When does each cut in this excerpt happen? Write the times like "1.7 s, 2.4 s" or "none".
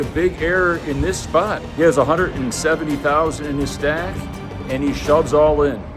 none